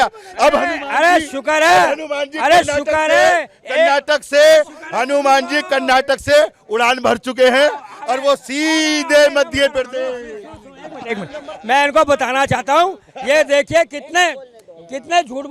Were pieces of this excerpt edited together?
no; 0 cuts

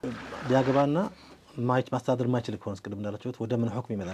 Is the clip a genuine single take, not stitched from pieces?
yes; 0 cuts

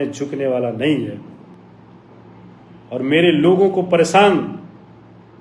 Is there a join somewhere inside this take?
no; 0 cuts

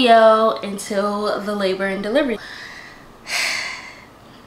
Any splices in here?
yes; 1 cut; at 2.4 s

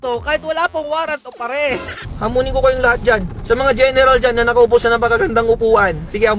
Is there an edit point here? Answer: yes; 1 cut; at 2.0 s

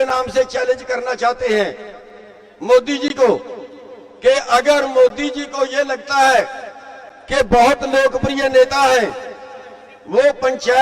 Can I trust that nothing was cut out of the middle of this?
yes; 0 cuts

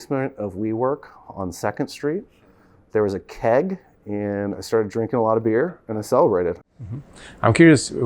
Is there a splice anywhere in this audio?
yes; 1 cut; at 6.6 s

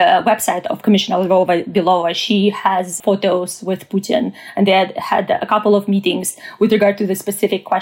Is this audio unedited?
no; 1 cut; at 3.0 s

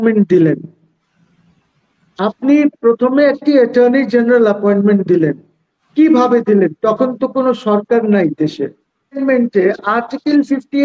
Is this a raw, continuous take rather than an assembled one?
no; 1 cut; at 9.2 s

